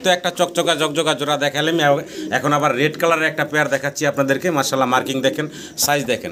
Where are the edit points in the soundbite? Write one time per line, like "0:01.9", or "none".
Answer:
none